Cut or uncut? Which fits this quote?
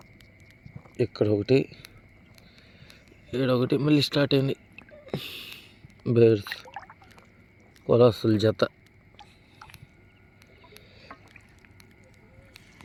uncut